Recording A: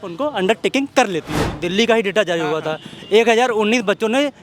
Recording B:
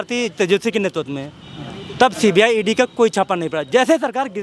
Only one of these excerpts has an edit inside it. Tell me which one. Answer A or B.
A